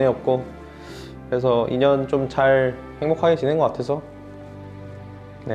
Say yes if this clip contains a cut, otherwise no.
yes